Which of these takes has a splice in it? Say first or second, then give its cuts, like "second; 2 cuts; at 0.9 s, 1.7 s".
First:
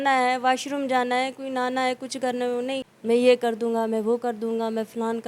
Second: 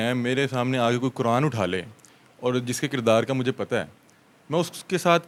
first; 1 cut; at 2.9 s